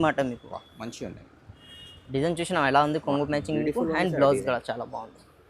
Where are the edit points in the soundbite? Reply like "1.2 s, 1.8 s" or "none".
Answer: 1.4 s